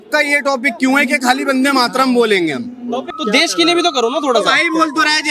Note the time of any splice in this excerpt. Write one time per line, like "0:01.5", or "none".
0:03.1